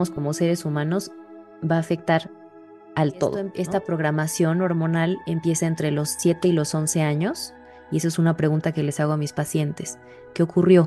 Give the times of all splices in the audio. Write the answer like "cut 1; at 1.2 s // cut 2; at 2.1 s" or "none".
cut 1; at 3.6 s

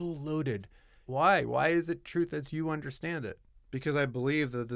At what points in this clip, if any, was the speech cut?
cut 1; at 1.0 s

